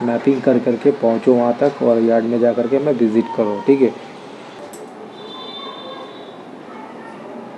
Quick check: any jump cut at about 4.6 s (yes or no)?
yes